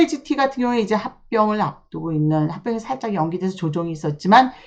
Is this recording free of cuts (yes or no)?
yes